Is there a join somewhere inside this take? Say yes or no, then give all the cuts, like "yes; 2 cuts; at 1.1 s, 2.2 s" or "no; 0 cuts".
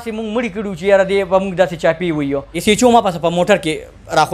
yes; 1 cut; at 2.5 s